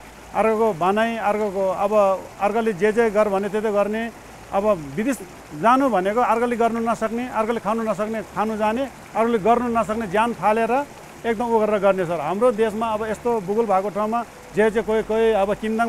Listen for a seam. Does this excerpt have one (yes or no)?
no